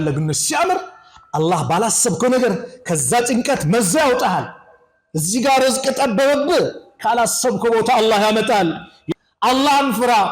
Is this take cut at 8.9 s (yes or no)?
yes